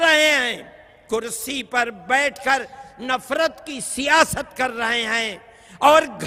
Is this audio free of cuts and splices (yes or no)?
yes